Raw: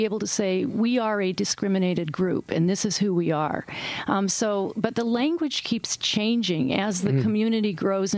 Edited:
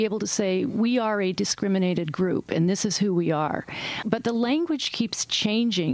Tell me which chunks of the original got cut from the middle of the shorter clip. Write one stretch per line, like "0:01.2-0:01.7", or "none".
0:04.0-0:04.7